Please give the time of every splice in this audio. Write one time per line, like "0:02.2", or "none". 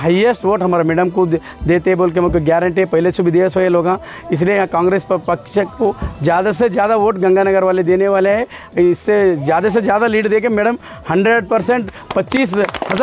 none